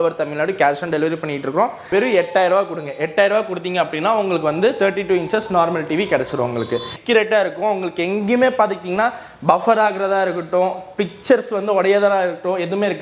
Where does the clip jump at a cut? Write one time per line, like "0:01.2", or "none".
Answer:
0:01.8
0:06.9